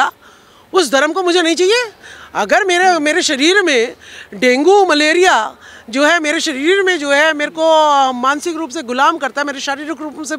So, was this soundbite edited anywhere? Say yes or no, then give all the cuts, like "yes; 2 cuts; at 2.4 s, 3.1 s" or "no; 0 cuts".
no; 0 cuts